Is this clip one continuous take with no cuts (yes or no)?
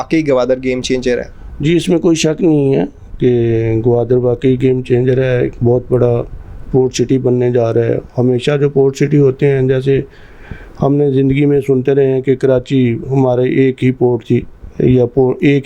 yes